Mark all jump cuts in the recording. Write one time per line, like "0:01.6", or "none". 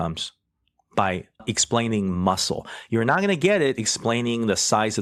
none